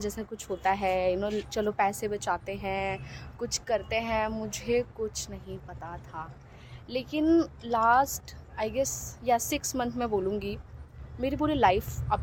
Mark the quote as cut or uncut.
uncut